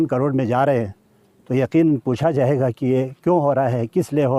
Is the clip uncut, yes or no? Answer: yes